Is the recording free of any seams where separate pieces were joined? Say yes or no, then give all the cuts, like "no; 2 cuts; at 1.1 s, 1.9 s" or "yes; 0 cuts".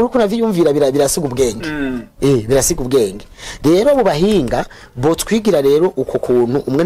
yes; 0 cuts